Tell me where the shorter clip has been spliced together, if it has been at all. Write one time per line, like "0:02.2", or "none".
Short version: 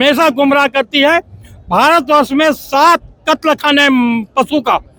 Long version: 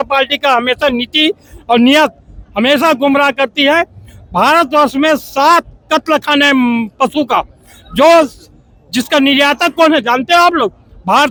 none